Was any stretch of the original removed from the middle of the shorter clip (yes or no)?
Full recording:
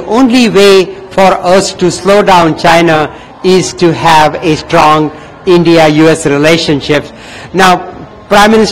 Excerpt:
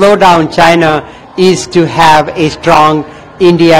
no